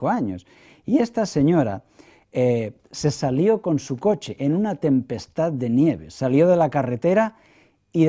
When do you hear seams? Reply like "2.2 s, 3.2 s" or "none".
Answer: 5.2 s